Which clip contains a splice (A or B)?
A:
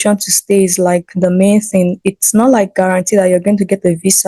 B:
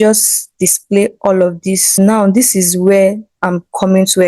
B